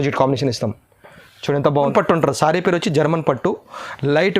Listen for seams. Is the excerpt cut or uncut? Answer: cut